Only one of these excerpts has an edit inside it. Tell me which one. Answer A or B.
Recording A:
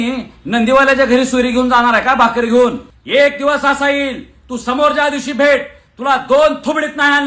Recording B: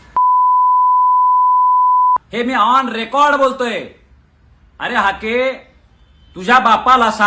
A